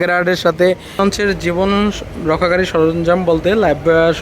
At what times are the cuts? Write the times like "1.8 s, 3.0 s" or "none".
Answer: 1.0 s